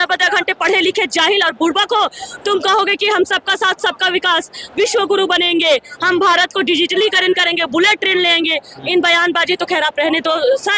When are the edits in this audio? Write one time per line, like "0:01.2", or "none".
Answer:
none